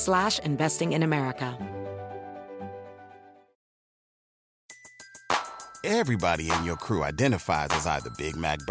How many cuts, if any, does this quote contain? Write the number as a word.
one